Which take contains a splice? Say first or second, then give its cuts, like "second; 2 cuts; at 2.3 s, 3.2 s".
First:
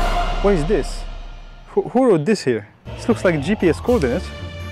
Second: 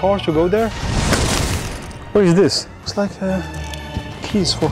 second; 2 cuts; at 0.8 s, 2.7 s